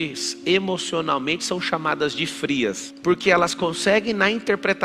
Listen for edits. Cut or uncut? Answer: cut